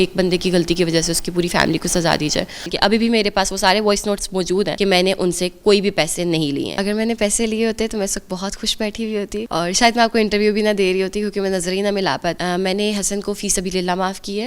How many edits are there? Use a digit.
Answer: 5